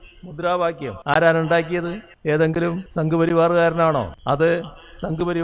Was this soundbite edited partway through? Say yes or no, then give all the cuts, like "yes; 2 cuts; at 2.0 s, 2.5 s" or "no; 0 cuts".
yes; 4 cuts; at 0.9 s, 2.1 s, 2.8 s, 4.2 s